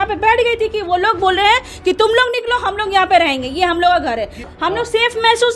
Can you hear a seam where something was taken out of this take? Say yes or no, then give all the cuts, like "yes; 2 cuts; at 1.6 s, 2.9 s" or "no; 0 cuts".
yes; 1 cut; at 4.5 s